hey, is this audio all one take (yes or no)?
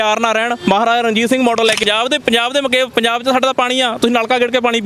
no